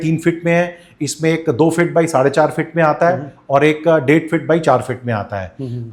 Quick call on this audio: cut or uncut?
uncut